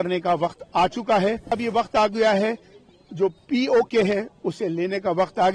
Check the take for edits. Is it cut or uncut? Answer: cut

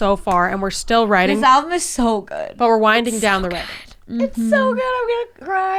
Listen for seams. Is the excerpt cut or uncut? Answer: uncut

